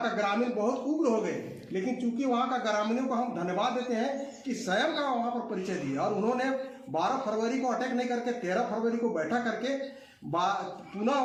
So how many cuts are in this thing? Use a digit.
0